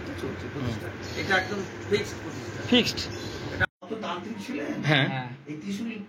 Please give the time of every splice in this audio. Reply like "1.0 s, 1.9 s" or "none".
3.6 s